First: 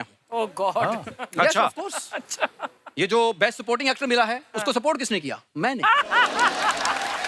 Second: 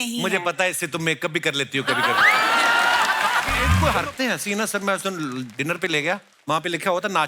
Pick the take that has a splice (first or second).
second